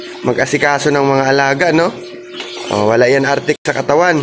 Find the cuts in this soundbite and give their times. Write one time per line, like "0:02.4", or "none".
none